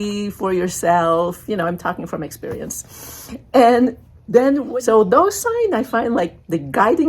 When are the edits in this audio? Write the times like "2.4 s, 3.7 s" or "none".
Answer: 4.6 s